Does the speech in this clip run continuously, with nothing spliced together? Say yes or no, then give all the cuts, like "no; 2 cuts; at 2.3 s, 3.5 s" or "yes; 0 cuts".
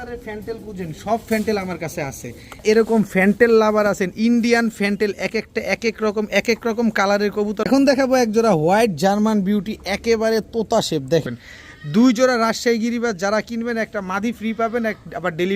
no; 3 cuts; at 2.6 s, 7.6 s, 11.2 s